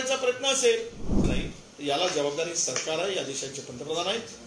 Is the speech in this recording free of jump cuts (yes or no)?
no